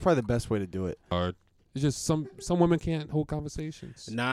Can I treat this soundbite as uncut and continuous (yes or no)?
no